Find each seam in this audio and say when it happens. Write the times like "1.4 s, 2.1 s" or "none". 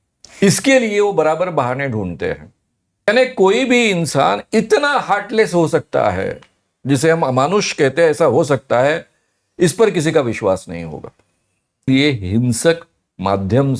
3.1 s, 11.9 s